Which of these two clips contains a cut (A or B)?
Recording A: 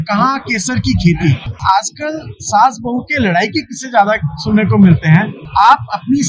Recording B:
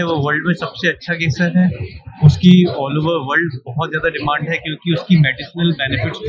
A